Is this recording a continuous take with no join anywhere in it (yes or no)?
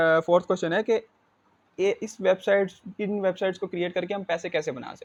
yes